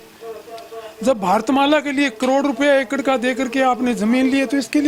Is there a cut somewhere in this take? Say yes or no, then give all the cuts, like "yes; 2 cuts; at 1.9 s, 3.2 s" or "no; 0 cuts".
no; 0 cuts